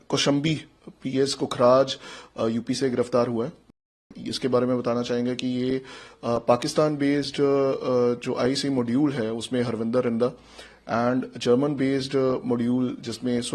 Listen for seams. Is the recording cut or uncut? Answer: uncut